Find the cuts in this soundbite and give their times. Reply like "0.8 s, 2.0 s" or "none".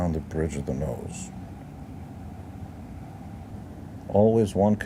3.5 s